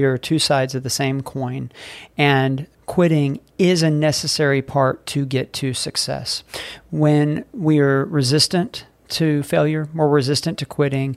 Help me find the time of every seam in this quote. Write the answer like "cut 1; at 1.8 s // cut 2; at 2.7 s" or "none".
cut 1; at 2.7 s